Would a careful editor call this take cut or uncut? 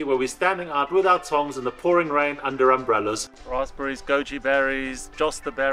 cut